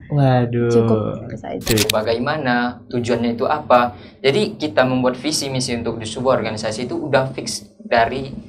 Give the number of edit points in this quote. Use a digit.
1